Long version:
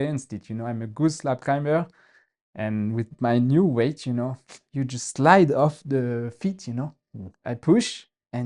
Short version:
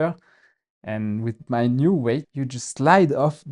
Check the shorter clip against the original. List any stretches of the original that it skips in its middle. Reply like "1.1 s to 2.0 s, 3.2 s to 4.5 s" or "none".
4.0 s to 4.7 s